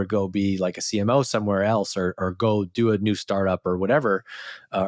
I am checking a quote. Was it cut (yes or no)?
no